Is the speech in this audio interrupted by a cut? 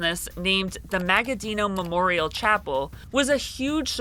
no; 0 cuts

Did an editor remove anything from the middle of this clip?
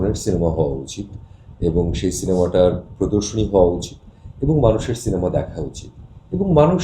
no; 0 cuts

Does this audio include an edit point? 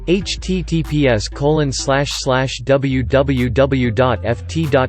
no; 0 cuts

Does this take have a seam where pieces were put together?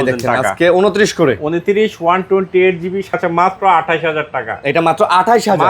yes; 1 cut; at 3.1 s

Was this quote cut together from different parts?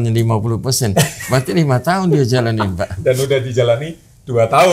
no; 0 cuts

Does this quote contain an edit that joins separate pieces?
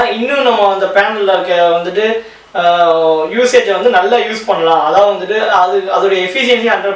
no; 0 cuts

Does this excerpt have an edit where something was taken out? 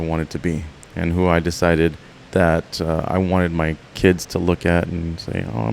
yes; 1 cut; at 2.1 s

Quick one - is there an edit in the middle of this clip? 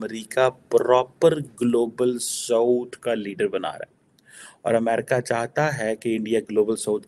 no; 0 cuts

